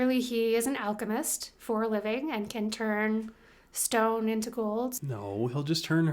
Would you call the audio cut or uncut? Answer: cut